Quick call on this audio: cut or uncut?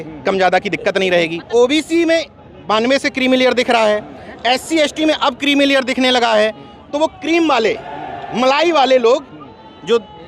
cut